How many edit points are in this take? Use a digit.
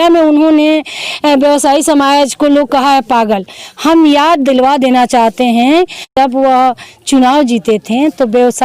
1